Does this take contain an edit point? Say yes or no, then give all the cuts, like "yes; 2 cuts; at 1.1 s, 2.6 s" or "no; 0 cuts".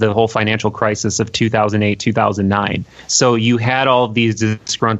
no; 0 cuts